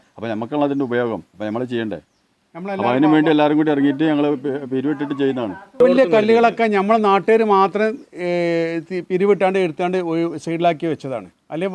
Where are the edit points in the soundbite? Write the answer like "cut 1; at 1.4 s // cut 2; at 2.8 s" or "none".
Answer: cut 1; at 5.8 s